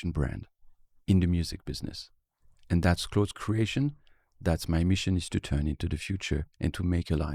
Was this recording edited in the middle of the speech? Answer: no; 0 cuts

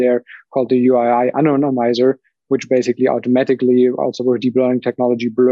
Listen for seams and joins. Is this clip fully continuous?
yes; 0 cuts

